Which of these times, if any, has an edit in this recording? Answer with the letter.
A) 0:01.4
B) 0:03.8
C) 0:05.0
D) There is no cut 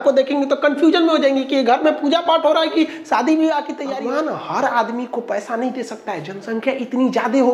B